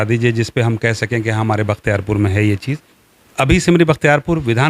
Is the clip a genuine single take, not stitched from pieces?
no; 1 cut; at 2.9 s

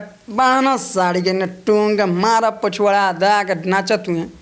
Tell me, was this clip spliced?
no; 0 cuts

